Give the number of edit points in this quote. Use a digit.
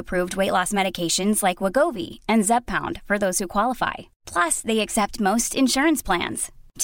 0